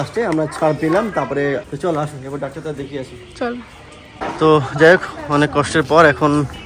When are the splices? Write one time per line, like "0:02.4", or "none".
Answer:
0:04.1